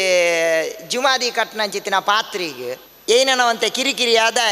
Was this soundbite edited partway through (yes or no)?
yes